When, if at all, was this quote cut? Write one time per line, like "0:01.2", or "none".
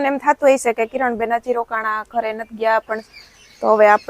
0:03.0